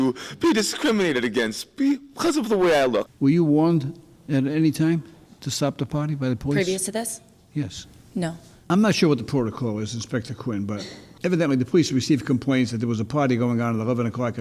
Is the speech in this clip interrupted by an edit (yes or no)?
yes